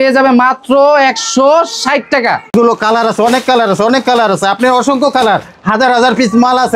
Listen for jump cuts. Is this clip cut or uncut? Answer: cut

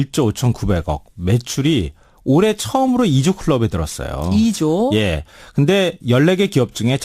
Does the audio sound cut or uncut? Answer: cut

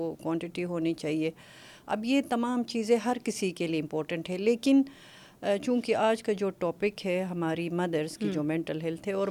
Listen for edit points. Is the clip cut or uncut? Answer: uncut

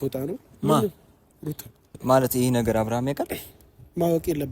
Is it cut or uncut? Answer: cut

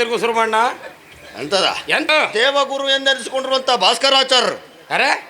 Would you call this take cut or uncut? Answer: cut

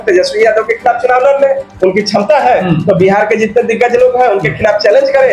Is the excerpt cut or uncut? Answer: uncut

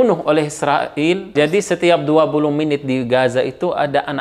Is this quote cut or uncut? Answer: cut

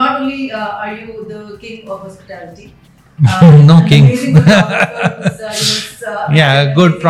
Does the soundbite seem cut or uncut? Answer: uncut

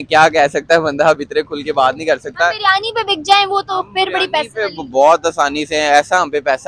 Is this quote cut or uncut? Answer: uncut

